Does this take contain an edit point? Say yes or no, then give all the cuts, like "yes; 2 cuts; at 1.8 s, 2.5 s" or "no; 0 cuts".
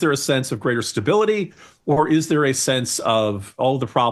no; 0 cuts